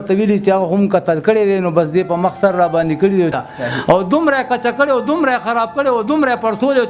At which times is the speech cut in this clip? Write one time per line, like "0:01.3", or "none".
0:03.3

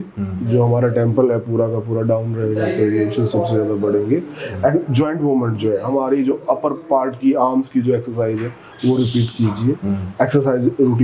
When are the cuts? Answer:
none

